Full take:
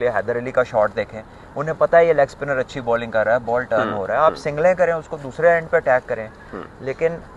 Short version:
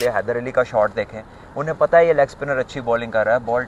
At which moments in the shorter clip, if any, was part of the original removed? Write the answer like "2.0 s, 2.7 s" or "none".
none